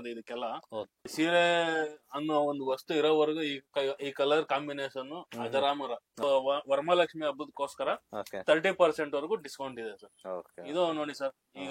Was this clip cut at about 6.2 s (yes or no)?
yes